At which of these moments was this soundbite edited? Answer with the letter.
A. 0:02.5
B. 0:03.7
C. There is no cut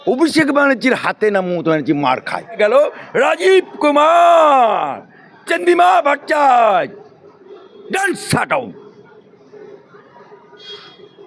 A